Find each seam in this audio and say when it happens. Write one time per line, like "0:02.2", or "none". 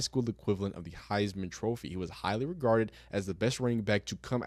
none